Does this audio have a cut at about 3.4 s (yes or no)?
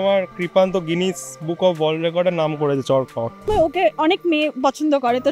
yes